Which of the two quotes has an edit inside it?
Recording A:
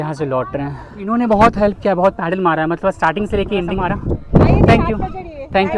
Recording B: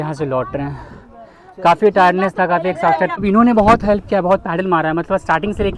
A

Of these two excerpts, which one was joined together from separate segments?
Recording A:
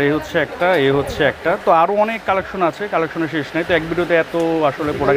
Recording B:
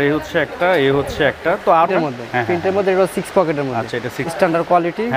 B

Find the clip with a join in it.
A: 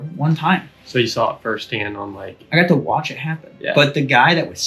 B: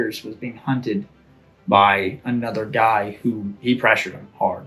B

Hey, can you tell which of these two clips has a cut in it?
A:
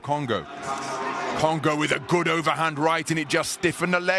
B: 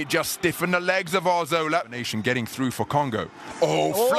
B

